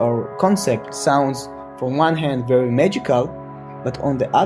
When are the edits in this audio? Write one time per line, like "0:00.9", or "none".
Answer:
0:00.9